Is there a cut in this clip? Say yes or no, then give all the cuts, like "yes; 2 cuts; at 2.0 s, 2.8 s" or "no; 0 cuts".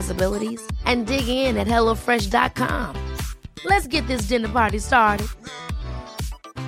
no; 0 cuts